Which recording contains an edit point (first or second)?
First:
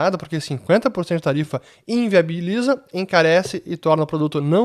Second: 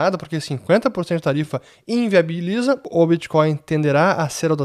second